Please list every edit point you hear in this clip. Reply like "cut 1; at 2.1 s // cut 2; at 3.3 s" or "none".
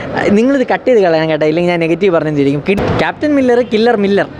cut 1; at 2.8 s